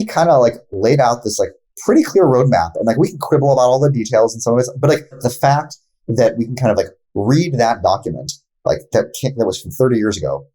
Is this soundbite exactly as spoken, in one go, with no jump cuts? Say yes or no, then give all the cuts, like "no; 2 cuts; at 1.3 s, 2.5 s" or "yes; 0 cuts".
no; 1 cut; at 5.2 s